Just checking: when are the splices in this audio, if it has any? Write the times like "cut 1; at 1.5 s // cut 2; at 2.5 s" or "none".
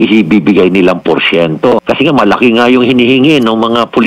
cut 1; at 1.8 s